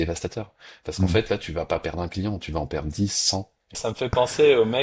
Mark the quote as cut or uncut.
cut